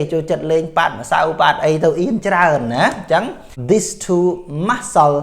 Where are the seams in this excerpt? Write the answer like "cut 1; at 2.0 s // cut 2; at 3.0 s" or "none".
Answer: cut 1; at 3.5 s